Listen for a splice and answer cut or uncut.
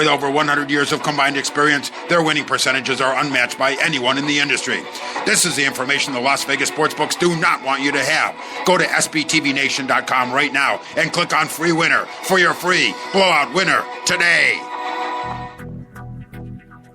cut